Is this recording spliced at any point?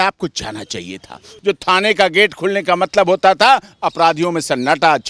yes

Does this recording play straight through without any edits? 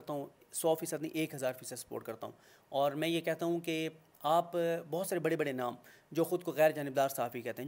yes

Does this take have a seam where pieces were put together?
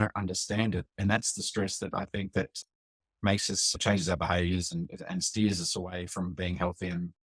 no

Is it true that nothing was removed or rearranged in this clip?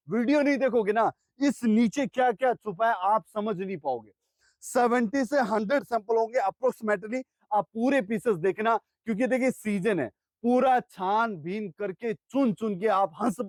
yes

